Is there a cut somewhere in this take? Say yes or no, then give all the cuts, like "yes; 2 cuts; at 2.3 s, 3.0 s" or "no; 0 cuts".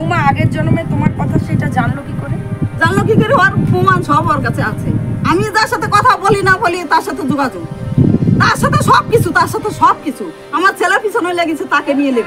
no; 0 cuts